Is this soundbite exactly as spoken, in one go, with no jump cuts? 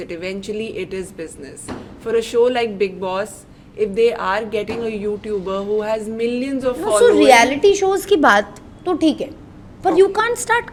yes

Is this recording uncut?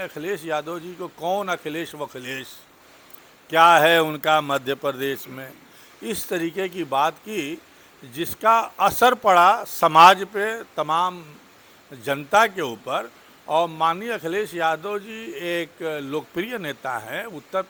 yes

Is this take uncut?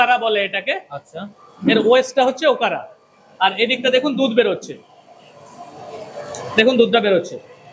yes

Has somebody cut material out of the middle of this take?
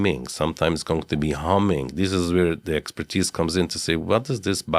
no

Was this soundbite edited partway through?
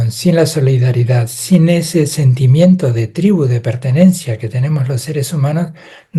no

